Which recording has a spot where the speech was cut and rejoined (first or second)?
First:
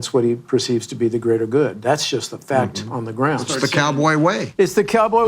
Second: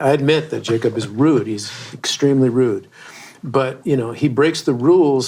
first